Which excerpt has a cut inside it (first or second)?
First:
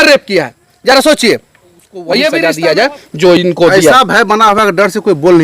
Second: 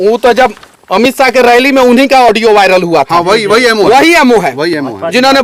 first